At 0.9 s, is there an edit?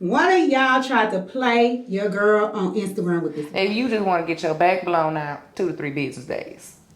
no; 1 cut; at 3.4 s

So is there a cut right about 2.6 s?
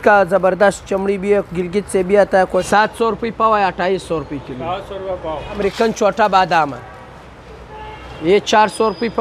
yes; 2 cuts; at 2.6 s, 5.6 s

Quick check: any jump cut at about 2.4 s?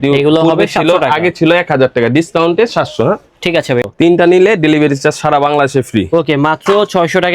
no; 1 cut; at 3.8 s

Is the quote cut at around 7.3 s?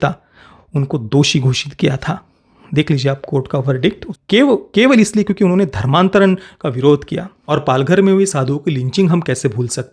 yes; 2 cuts; at 4.1 s, 7.3 s

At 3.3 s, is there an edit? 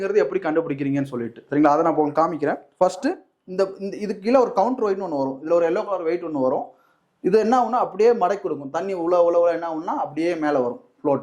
yes; 1 cut; at 3.3 s

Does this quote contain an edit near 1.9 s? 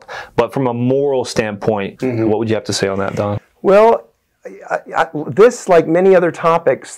yes; 1 cut; at 1.9 s

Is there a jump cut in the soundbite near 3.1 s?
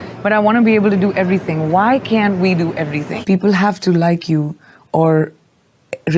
yes; 1 cut; at 3.1 s

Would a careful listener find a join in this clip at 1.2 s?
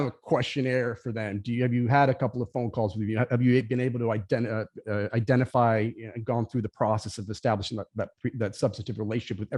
no; 0 cuts

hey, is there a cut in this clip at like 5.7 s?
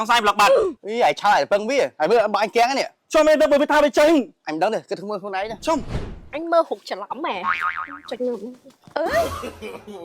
yes; 1 cut; at 5.7 s

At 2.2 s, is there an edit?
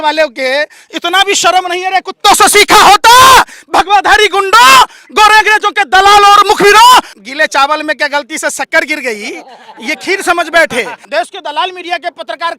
no; 2 cuts; at 7.2 s, 11.0 s

